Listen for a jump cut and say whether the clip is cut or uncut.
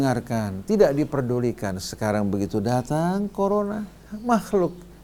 uncut